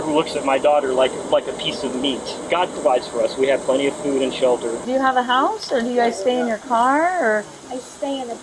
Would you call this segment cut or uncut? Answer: cut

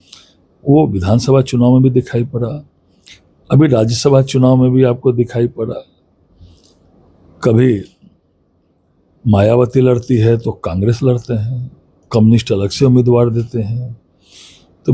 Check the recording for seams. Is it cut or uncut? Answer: uncut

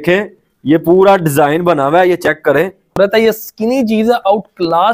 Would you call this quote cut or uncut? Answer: cut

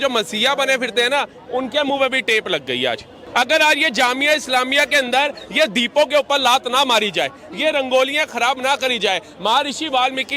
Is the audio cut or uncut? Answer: cut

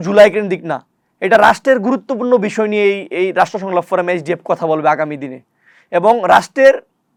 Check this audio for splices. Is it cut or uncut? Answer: uncut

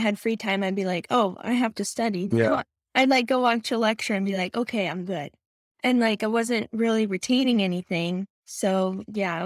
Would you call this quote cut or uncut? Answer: uncut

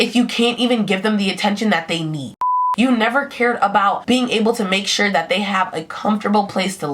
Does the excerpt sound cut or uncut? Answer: cut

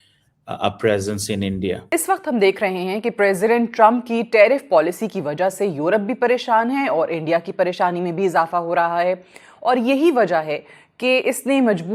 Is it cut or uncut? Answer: cut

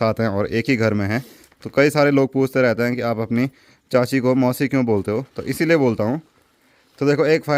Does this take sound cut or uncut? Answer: uncut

